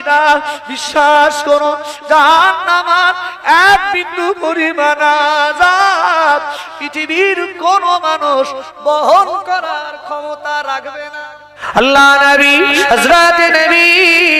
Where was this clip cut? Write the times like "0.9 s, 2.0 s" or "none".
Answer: 11.6 s

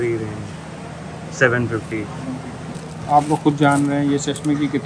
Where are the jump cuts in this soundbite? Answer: none

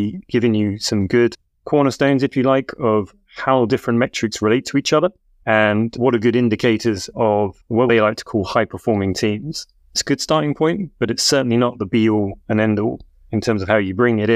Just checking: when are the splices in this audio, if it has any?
1.5 s, 5.3 s, 7.2 s, 10.0 s, 13.3 s

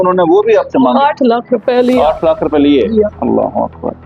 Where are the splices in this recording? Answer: 3.2 s

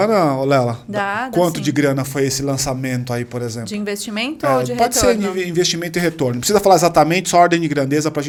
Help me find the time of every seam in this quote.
none

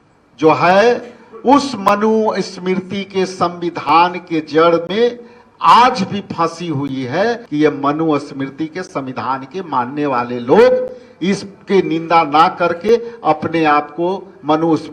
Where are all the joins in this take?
7.4 s

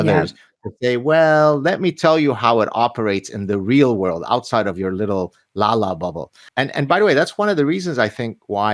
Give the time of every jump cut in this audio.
6.4 s

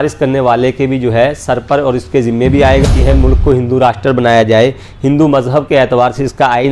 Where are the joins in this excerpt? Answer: 2.8 s

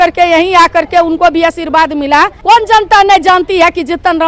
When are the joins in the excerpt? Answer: 2.4 s

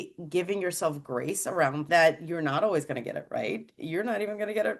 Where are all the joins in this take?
1.9 s

